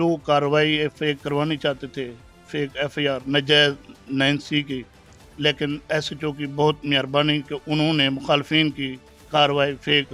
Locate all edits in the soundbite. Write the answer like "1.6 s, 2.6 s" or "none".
none